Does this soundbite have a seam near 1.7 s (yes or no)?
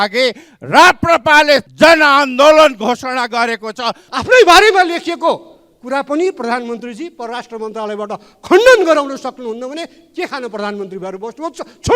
yes